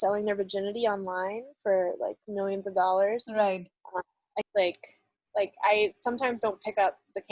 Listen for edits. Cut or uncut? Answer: cut